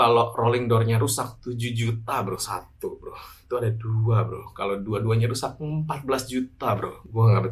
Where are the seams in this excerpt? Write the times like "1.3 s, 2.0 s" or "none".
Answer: none